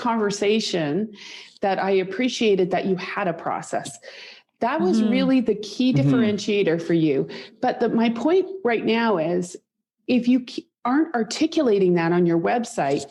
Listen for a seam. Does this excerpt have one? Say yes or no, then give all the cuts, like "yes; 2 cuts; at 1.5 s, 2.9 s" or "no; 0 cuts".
no; 0 cuts